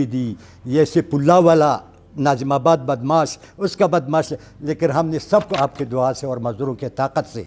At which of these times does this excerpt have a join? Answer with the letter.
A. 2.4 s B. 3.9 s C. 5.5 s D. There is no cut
C